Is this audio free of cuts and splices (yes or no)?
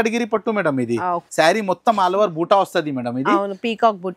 no